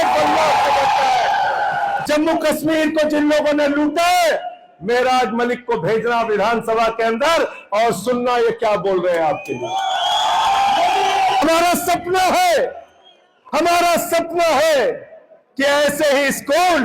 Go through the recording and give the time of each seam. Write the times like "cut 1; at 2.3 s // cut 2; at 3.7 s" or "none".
cut 1; at 2.0 s // cut 2; at 11.4 s